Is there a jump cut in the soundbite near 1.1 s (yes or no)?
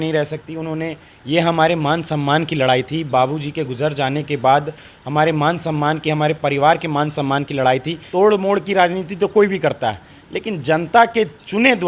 no